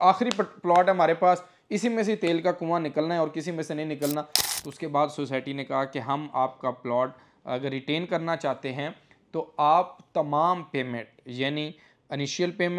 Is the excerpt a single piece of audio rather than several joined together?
no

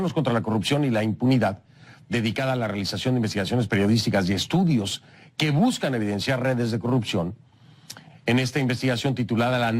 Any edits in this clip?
yes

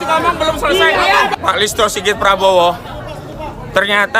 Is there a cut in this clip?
yes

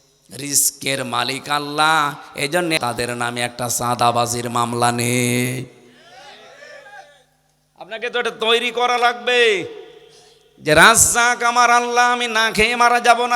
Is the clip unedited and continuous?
no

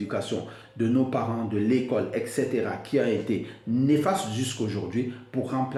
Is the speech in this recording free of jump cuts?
yes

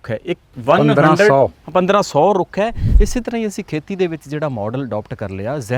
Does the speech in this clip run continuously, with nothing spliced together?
no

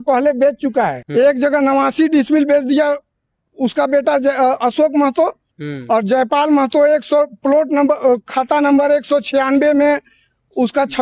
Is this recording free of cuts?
no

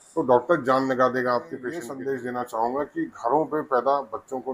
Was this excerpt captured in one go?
no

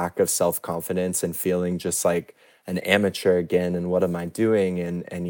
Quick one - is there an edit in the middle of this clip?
no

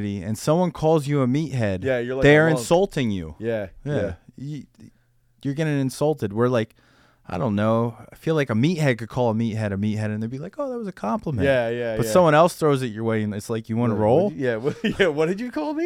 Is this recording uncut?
yes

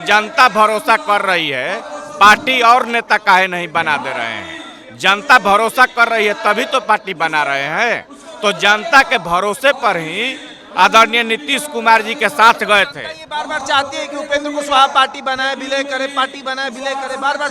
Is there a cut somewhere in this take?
no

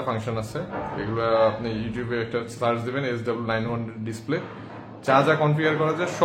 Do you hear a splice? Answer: no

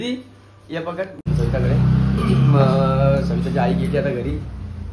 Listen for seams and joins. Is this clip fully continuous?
yes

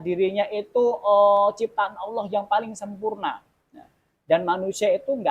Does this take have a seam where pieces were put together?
no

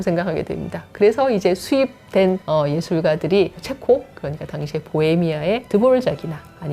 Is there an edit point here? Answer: yes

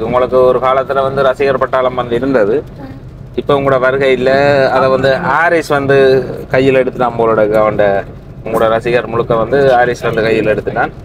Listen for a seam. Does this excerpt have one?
no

